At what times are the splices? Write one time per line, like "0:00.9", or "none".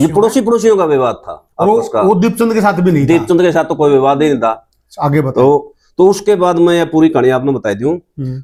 none

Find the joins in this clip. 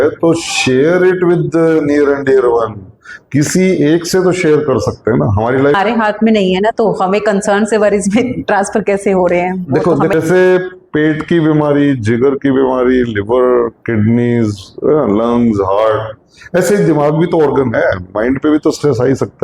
0:05.7
0:10.1

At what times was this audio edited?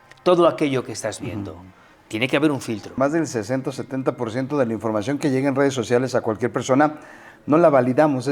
0:03.0

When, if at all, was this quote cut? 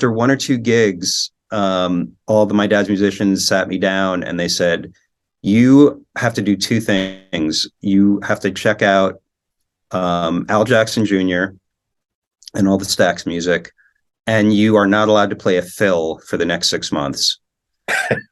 none

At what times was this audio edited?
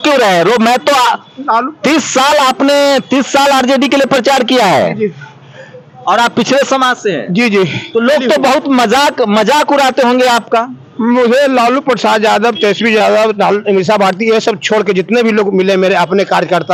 none

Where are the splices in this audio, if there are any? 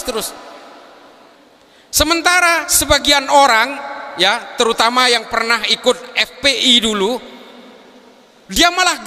0:01.4

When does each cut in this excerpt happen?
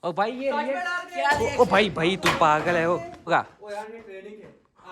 0:03.3

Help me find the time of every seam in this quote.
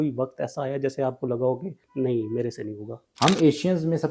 0:03.0

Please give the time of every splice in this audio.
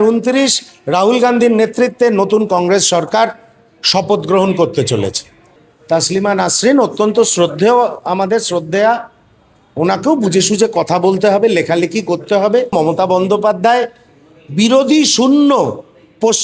0:05.5
0:12.7

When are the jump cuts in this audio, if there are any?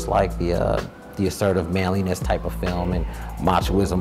none

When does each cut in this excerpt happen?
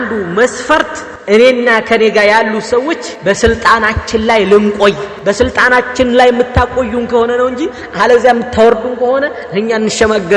0:01.1
0:03.1
0:05.1

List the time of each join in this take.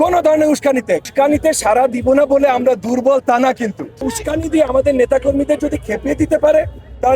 0:01.1
0:04.0

